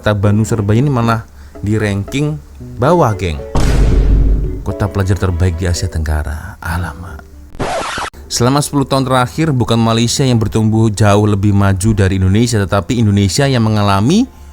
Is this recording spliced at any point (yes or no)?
yes